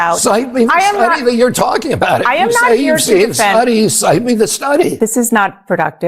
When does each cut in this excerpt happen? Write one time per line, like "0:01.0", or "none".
0:04.6